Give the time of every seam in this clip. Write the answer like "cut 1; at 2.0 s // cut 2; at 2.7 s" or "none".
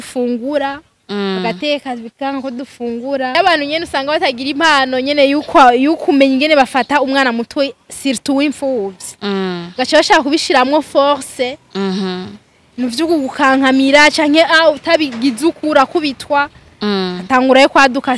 cut 1; at 3.4 s